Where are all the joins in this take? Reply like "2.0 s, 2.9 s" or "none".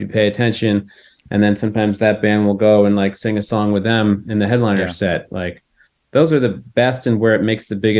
none